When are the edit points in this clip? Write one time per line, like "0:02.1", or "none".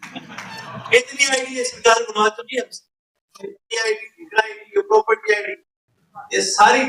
0:03.6